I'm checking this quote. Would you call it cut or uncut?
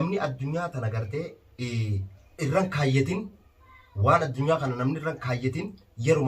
cut